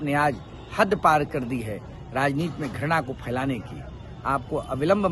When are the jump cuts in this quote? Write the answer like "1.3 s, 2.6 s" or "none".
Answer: none